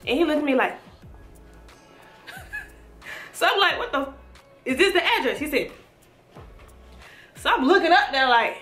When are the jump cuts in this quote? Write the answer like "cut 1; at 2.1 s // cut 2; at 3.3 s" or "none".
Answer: none